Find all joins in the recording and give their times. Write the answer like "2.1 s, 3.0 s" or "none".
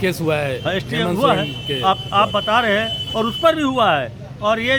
none